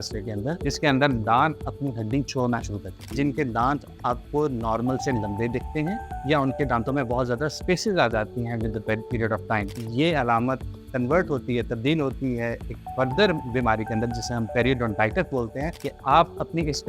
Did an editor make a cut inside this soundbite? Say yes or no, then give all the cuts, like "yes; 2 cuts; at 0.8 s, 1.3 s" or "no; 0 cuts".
yes; 3 cuts; at 3.1 s, 9.7 s, 15.7 s